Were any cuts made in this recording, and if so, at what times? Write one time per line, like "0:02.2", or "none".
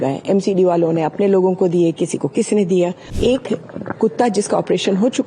0:03.0